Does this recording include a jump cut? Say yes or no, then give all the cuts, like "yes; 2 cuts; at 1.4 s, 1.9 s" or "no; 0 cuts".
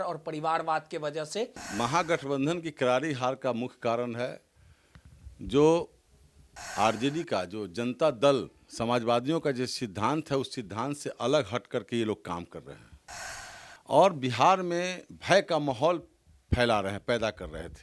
yes; 1 cut; at 1.7 s